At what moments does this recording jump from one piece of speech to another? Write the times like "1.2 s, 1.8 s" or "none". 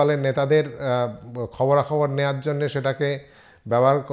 none

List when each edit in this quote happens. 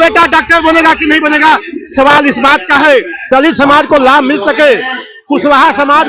3.2 s

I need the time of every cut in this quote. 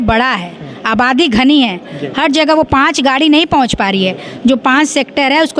none

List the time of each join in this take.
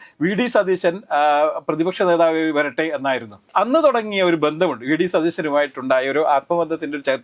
none

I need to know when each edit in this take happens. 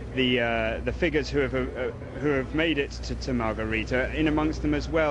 1.0 s

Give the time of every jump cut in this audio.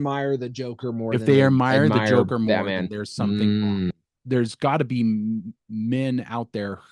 4.1 s

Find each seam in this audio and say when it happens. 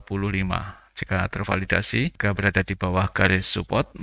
2.2 s

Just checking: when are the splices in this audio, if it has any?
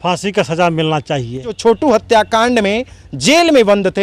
1.6 s

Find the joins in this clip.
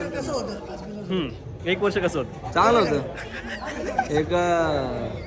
none

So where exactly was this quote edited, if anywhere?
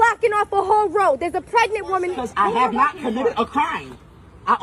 2.2 s

